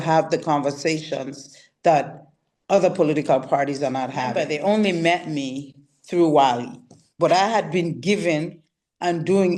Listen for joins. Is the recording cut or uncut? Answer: cut